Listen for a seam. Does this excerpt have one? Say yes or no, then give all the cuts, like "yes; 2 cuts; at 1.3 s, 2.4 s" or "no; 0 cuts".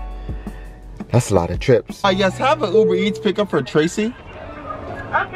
yes; 1 cut; at 1.9 s